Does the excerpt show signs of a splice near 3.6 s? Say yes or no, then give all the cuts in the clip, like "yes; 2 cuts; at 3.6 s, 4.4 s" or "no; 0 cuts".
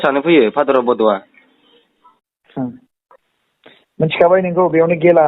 no; 1 cut; at 2.3 s